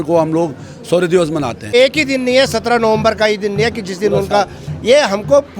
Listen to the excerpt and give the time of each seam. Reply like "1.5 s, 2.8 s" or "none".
1.7 s